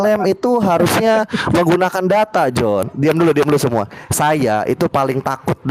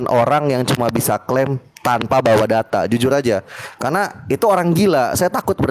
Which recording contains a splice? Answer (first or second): first